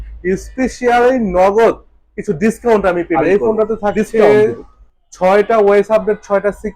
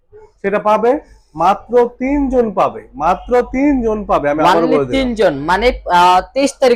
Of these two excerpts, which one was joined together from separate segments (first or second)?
first